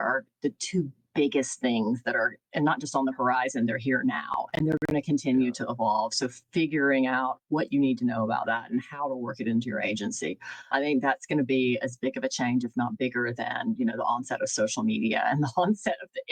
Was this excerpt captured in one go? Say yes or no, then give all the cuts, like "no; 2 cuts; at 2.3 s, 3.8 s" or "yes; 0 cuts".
no; 1 cut; at 10.7 s